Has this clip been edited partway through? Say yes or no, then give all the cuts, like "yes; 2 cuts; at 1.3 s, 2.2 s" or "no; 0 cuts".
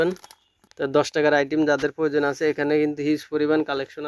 no; 0 cuts